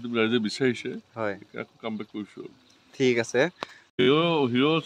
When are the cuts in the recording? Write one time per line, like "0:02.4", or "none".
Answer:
0:03.9